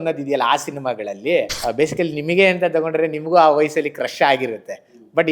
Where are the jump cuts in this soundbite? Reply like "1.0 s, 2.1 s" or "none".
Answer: 1.6 s